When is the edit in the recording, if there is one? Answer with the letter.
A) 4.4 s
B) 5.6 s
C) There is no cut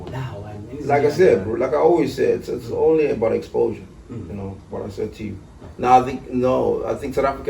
B